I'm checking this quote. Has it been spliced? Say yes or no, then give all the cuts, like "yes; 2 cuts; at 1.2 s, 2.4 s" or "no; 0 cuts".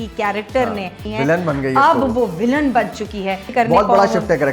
yes; 2 cuts; at 1.0 s, 3.5 s